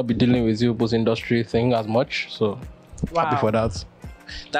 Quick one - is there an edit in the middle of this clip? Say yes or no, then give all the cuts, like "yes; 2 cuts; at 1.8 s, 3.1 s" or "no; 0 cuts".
no; 0 cuts